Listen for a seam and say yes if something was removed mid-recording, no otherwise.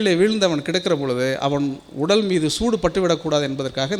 no